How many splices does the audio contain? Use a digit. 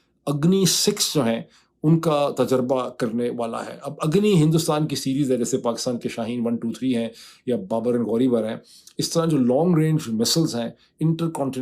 0